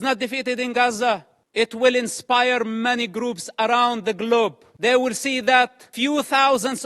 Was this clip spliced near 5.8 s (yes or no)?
yes